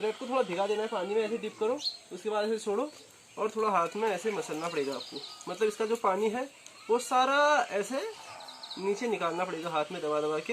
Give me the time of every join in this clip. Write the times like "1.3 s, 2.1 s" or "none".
none